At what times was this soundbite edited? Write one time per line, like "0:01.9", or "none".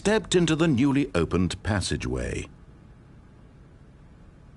0:02.5